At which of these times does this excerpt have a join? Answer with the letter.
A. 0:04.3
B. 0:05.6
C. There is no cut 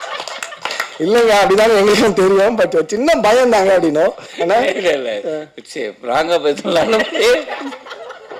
A